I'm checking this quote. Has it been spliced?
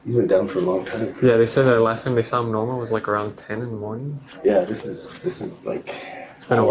no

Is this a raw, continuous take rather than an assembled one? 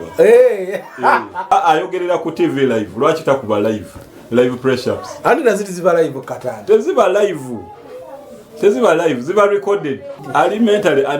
no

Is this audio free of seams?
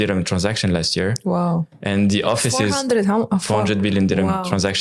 yes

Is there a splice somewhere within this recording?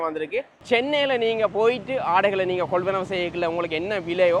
no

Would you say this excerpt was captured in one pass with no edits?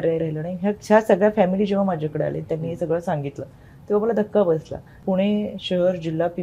no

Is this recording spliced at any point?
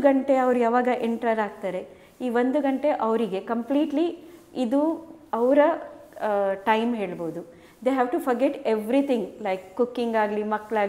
no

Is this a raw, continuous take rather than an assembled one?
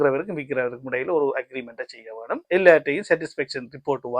no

